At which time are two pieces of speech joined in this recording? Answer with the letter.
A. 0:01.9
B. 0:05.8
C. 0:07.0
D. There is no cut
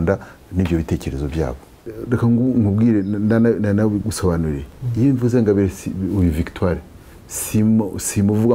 A